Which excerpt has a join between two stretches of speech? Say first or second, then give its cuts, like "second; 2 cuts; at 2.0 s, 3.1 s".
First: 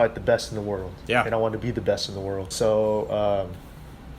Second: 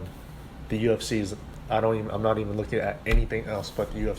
first; 1 cut; at 2.5 s